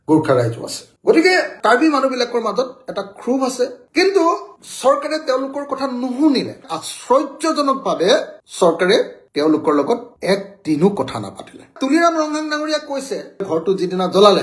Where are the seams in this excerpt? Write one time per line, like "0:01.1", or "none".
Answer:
0:03.8
0:13.4